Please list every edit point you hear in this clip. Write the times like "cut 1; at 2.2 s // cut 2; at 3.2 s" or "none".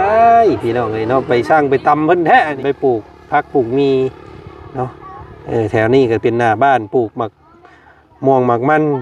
cut 1; at 2.6 s